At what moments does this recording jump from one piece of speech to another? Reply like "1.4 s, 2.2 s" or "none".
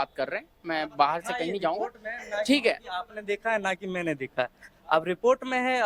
none